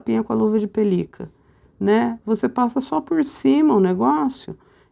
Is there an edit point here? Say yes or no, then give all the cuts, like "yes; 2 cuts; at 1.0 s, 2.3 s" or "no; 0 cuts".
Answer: no; 0 cuts